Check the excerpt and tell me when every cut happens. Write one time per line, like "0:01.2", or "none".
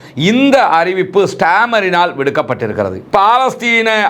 0:03.0